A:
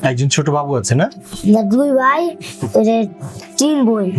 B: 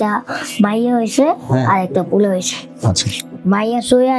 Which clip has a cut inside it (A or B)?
A